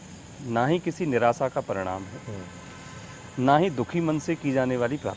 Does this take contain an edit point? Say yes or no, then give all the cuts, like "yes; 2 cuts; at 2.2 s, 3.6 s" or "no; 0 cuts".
no; 0 cuts